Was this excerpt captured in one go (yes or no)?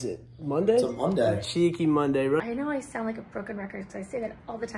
no